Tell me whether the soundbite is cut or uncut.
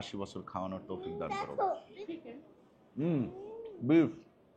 cut